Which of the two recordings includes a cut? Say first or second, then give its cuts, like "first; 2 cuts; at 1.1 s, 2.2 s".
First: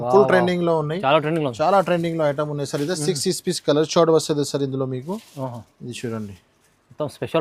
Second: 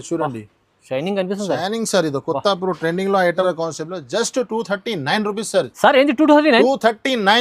second; 1 cut; at 3.4 s